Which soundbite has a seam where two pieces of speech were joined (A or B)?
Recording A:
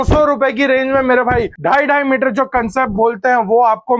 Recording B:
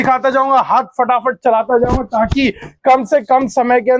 A